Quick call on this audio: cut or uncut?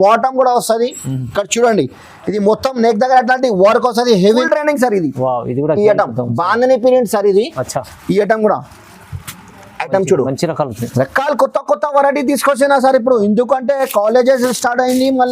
cut